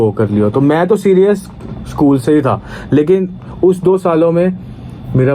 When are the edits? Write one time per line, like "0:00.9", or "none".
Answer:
none